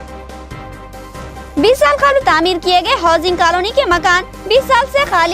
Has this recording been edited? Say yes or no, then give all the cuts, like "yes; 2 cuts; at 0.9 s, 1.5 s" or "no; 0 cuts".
no; 0 cuts